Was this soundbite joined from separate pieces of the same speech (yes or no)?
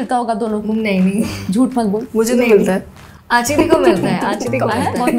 no